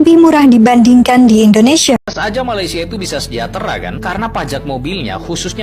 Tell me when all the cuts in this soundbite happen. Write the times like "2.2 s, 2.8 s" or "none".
2.0 s